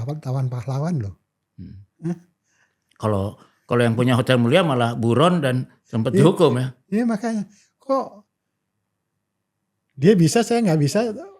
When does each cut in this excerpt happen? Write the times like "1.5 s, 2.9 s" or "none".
none